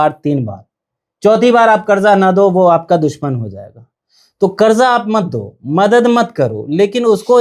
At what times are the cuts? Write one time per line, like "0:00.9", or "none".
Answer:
none